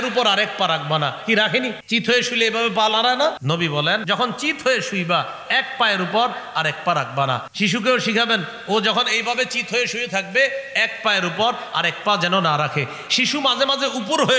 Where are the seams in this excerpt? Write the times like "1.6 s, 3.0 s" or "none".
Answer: 1.8 s, 3.9 s, 7.5 s